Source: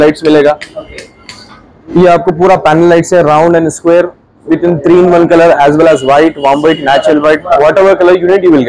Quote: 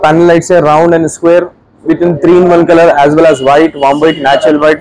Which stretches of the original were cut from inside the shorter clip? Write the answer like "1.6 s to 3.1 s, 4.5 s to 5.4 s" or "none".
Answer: none